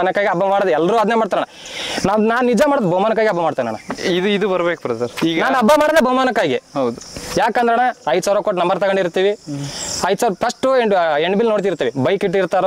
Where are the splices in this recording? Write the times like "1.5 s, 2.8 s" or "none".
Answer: none

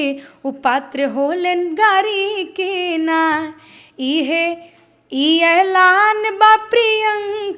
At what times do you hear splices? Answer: none

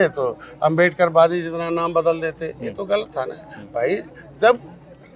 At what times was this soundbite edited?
none

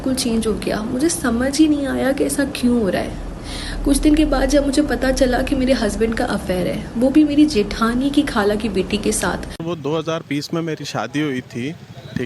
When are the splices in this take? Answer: 9.5 s

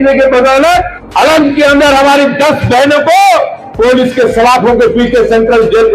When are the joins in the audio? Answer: 1.0 s

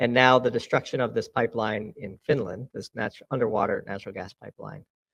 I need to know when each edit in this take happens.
none

